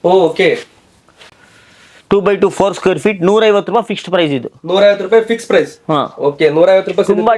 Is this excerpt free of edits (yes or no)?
yes